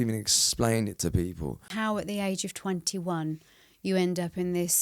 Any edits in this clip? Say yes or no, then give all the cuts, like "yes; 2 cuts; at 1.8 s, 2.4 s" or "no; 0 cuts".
yes; 1 cut; at 1.7 s